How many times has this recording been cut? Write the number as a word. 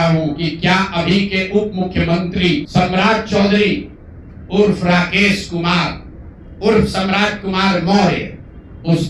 one